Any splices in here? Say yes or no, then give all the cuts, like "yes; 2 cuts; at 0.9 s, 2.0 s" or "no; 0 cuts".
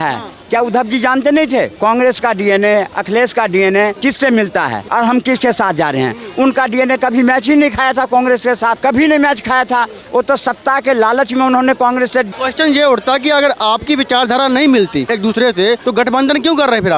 yes; 8 cuts; at 1.7 s, 3.0 s, 4.0 s, 4.8 s, 8.8 s, 12.3 s, 15.1 s, 15.8 s